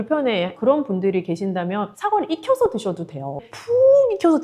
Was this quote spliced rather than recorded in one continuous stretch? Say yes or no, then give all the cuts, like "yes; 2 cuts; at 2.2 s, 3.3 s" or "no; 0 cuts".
yes; 1 cut; at 3.4 s